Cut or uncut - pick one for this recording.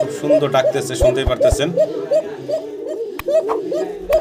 uncut